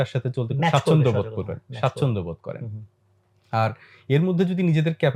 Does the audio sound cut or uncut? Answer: uncut